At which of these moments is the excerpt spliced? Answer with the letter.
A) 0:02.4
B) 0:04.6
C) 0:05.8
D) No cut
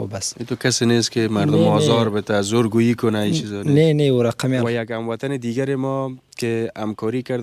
B